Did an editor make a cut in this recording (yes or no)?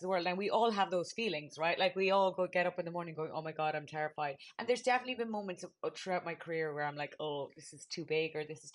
no